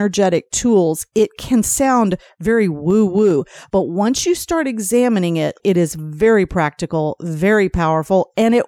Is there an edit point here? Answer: yes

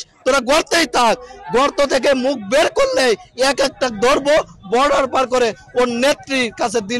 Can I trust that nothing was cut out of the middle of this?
yes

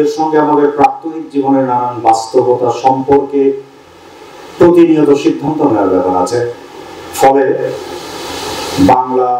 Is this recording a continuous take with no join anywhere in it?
yes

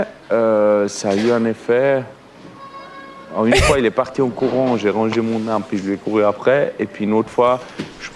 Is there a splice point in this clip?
no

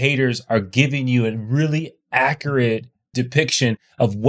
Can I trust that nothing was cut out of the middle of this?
no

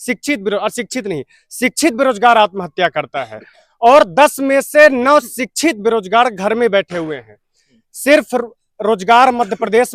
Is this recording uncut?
yes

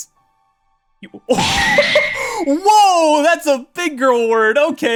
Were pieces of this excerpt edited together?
no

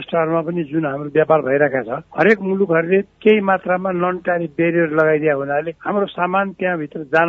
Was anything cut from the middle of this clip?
no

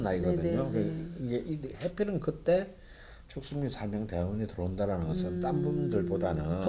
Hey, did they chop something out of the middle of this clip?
no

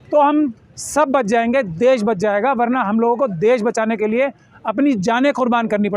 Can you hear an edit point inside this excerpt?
no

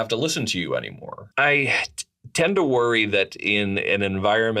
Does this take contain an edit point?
yes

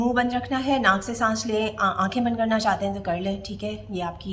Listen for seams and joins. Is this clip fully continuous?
yes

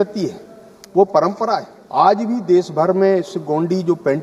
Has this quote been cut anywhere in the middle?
yes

